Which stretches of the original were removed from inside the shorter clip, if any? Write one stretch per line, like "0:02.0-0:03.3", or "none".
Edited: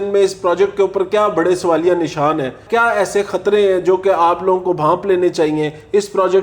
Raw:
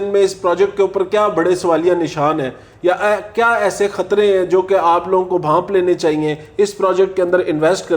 0:02.6-0:03.3